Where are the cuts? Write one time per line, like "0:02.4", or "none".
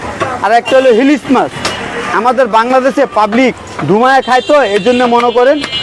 none